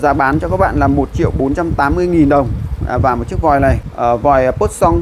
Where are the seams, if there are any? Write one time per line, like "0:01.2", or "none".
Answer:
0:03.9